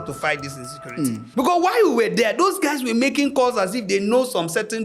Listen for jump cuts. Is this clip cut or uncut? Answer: cut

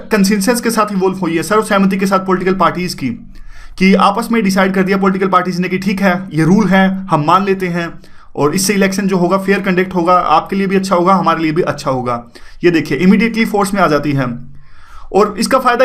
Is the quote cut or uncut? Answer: cut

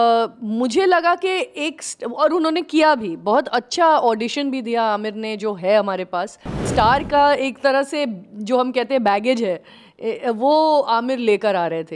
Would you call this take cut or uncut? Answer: cut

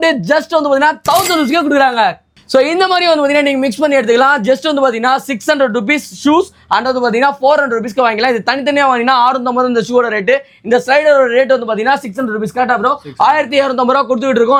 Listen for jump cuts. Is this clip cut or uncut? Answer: uncut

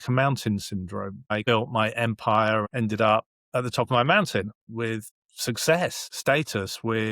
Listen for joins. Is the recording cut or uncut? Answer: cut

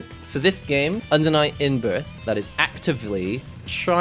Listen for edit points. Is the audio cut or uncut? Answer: cut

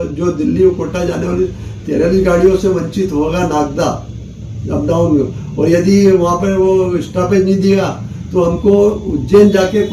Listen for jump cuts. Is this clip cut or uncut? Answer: uncut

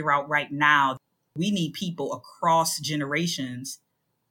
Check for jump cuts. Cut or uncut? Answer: cut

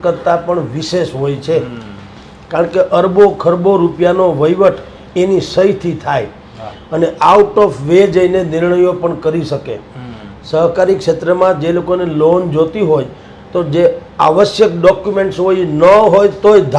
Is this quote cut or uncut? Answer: uncut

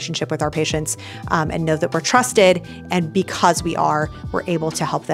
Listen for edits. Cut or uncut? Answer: uncut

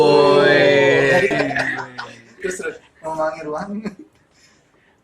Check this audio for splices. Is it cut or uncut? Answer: cut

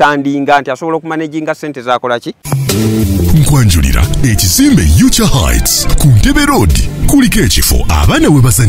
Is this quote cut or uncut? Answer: cut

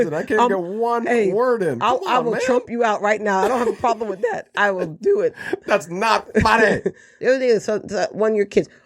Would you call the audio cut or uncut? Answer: cut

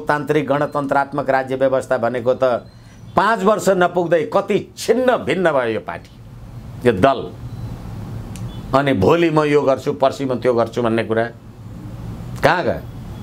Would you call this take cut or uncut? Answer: uncut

